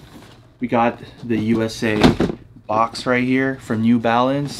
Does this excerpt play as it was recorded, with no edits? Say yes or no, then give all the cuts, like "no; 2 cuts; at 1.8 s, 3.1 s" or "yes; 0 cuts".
yes; 0 cuts